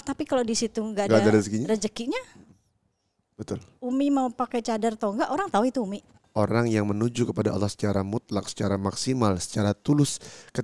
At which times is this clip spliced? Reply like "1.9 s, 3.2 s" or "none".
6.1 s